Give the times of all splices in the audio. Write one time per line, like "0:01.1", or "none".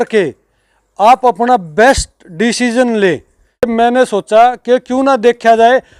0:03.6